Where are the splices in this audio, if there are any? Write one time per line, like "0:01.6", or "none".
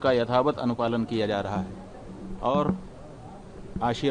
none